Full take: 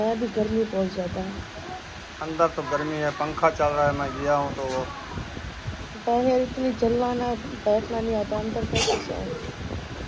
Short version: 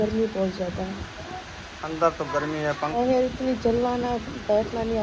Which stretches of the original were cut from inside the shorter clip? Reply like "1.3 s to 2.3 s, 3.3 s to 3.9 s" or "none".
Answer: 3.3 s to 6.1 s